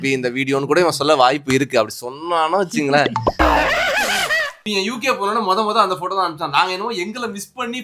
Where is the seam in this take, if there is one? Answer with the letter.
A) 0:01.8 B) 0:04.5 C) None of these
B